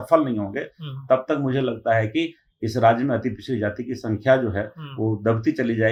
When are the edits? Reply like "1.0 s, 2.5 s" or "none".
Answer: none